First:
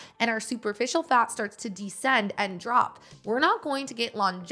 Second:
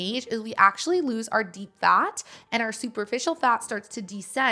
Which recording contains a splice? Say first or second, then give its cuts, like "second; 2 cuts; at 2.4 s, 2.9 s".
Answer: first; 1 cut; at 3.1 s